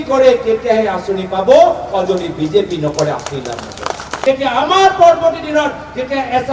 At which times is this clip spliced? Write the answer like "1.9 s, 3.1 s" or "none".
4.1 s